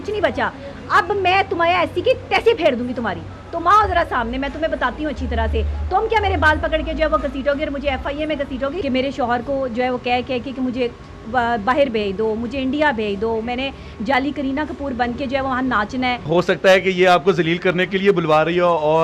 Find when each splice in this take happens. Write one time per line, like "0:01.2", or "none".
0:08.8
0:16.2